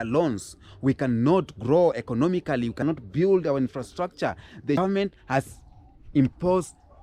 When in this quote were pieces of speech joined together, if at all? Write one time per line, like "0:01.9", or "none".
0:02.8
0:04.8